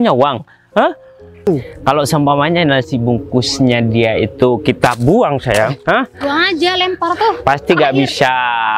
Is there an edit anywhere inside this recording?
yes; 1 cut; at 1.5 s

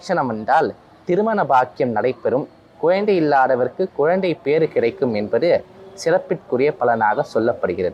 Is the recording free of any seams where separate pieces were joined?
yes; 0 cuts

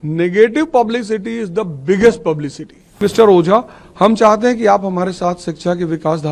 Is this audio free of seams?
no; 1 cut; at 3.0 s

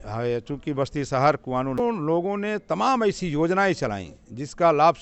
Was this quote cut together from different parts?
yes; 1 cut; at 1.8 s

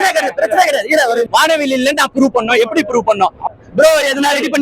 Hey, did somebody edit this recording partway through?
yes; 2 cuts; at 1.3 s, 3.4 s

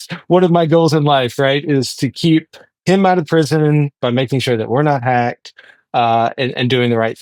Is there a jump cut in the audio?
no; 0 cuts

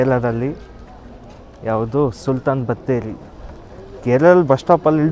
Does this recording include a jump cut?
no; 0 cuts

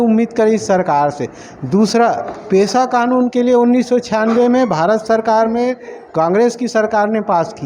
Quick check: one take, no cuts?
yes; 0 cuts

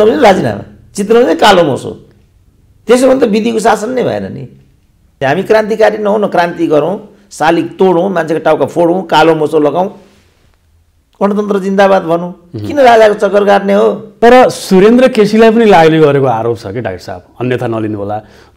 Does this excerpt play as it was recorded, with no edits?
no; 2 cuts; at 5.1 s, 14.1 s

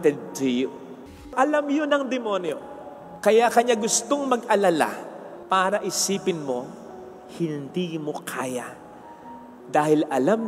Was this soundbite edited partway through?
yes; 1 cut; at 1.3 s

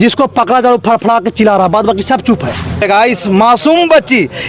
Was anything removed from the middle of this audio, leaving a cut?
yes; 1 cut; at 2.8 s

